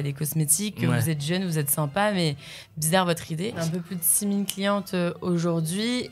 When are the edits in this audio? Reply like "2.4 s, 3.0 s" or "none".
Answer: 3.6 s